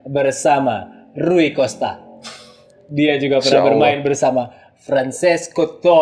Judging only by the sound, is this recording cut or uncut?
uncut